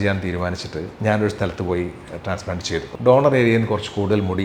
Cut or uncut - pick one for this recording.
cut